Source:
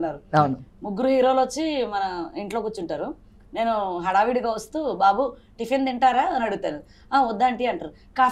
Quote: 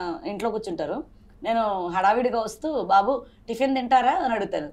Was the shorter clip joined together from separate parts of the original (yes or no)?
no